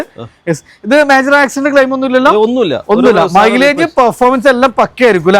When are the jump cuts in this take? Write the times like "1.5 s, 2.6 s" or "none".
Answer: none